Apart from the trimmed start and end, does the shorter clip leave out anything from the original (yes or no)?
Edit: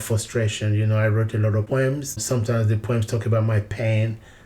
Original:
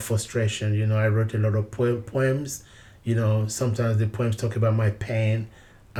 yes